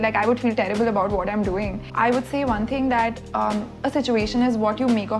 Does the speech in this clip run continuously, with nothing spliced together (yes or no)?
no